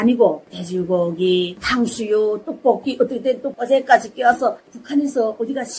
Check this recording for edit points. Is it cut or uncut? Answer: cut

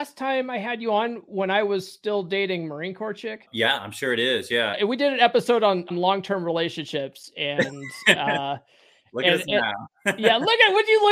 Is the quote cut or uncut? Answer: cut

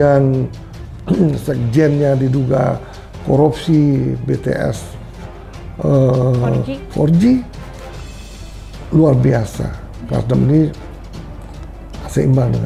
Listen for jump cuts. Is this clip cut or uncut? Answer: uncut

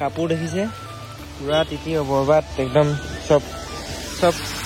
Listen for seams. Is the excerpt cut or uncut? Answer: uncut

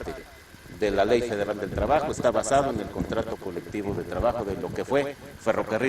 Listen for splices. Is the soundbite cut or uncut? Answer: uncut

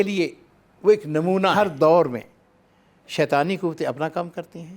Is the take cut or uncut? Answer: cut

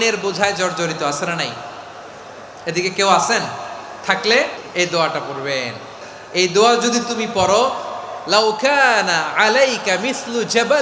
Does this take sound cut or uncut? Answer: cut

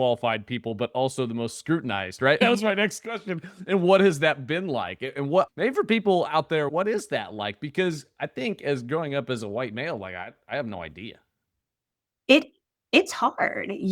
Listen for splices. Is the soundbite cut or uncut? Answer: cut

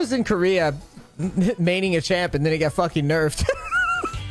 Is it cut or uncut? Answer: uncut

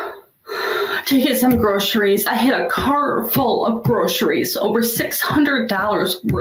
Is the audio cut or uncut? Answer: uncut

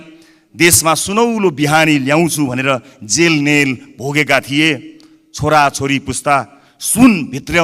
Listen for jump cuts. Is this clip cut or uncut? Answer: uncut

